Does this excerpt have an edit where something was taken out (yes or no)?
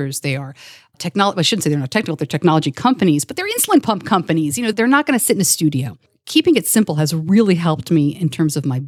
yes